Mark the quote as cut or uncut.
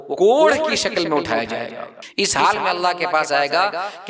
cut